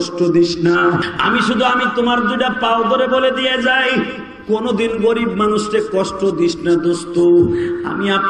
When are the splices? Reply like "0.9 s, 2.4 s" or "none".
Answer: 1.1 s